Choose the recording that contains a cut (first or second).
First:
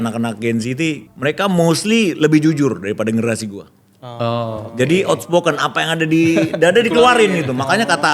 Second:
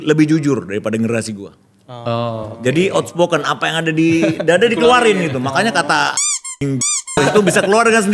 first